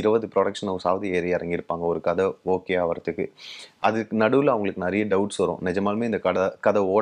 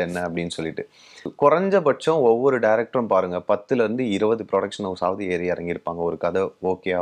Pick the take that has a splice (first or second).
second